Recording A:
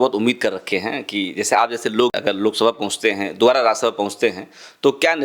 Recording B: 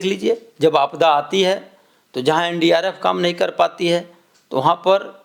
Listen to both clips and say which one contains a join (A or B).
A